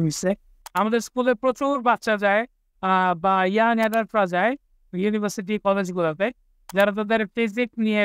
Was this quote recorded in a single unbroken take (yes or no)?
yes